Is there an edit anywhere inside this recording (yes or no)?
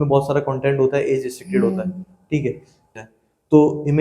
yes